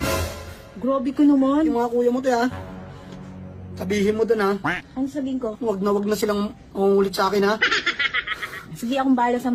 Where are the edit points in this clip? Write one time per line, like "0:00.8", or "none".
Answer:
none